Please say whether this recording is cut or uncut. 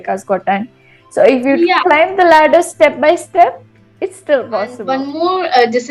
cut